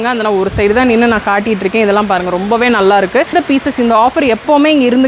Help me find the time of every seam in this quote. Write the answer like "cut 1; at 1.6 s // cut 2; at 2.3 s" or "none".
cut 1; at 3.3 s